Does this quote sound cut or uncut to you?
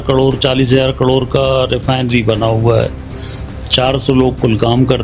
uncut